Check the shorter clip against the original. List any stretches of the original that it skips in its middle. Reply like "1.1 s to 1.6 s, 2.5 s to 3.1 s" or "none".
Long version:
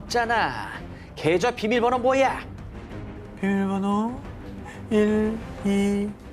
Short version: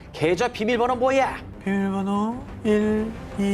2.5 s to 3.2 s, 4.2 s to 4.7 s